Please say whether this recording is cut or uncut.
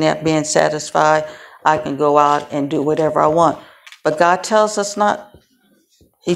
uncut